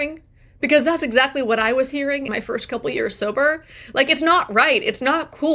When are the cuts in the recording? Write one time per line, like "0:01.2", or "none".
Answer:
0:02.3